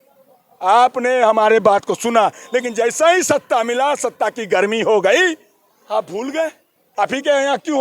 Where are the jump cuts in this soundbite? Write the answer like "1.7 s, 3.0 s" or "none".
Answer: 6.8 s

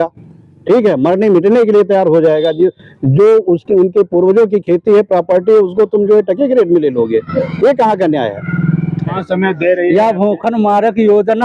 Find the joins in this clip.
9.2 s

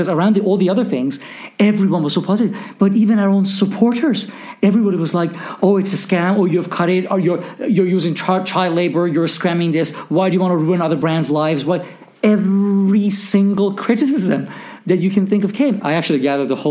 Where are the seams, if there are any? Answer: 15.8 s

